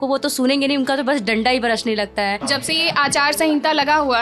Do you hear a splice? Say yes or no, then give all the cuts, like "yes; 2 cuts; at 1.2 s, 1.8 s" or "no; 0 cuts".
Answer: yes; 1 cut; at 2.4 s